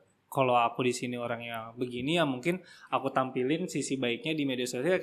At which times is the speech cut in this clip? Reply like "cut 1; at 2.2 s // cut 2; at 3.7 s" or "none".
none